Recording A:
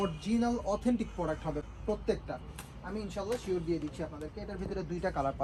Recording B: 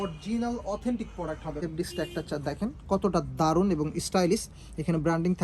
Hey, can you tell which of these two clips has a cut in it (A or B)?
B